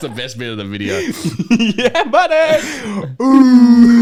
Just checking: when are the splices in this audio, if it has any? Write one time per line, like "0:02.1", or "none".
none

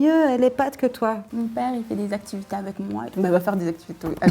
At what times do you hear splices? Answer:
0:01.3

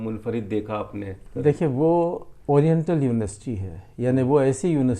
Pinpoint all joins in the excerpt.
0:01.2

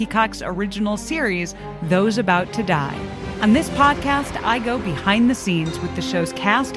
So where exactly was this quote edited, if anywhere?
0:03.2

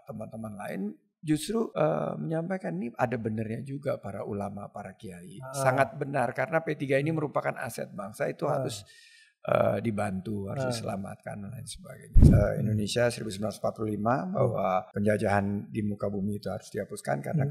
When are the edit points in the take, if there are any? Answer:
0:01.7
0:12.3
0:14.9

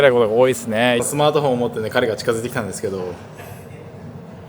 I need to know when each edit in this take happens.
0:01.0

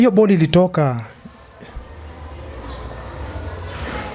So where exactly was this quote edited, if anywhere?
none

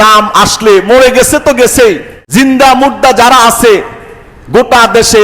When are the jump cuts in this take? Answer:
0:02.1

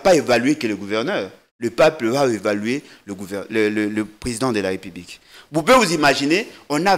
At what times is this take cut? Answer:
none

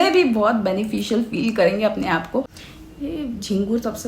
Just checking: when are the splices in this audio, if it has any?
0:02.6

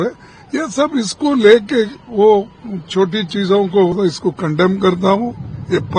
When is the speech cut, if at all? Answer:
0:04.0

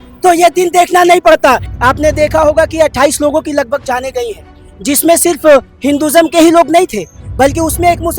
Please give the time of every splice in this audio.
0:01.7

